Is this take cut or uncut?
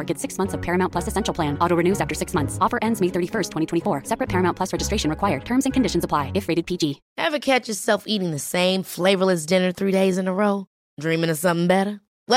uncut